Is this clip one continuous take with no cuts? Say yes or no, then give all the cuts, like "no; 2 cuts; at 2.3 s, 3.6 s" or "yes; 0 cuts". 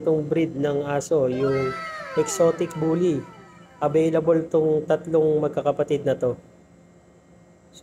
yes; 0 cuts